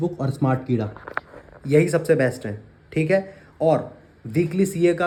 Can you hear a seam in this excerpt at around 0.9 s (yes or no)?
no